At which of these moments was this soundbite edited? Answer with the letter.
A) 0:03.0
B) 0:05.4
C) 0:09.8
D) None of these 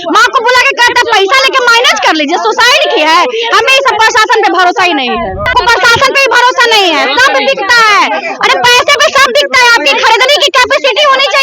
B